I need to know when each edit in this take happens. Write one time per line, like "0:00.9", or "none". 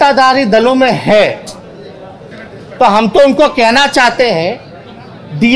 0:02.3

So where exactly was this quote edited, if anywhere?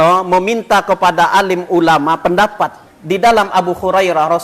0:02.9

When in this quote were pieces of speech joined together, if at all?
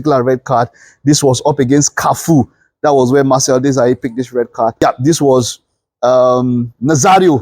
0:04.8

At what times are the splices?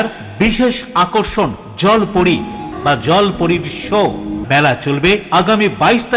0:02.7
0:04.4

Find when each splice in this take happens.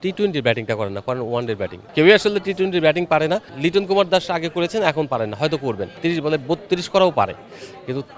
0:01.8
0:03.5
0:05.9

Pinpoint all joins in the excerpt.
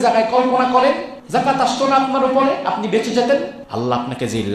0:01.1
0:03.6

